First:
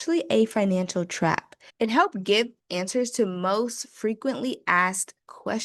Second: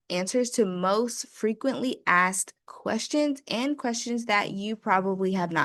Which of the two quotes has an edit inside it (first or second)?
first